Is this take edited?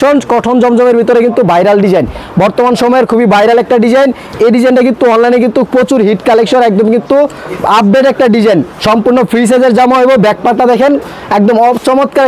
no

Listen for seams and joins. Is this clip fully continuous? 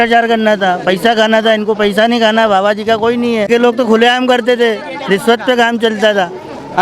no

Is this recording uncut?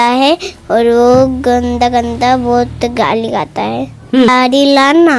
no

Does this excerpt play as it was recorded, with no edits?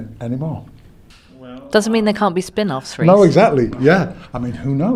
yes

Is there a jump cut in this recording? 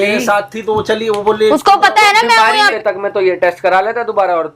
yes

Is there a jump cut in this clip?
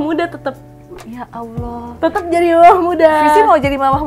no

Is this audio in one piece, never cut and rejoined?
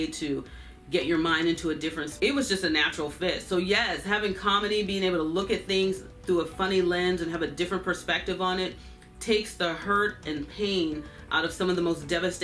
no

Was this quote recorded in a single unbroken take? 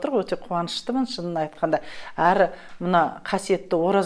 yes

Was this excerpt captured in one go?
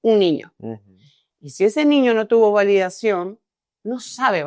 yes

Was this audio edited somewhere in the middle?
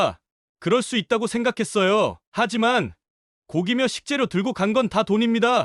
no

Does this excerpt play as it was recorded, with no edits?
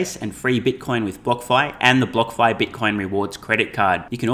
yes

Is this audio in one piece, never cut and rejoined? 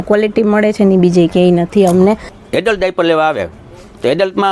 no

